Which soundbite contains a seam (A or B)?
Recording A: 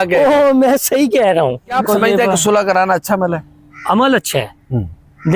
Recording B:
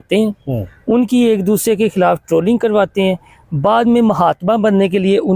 A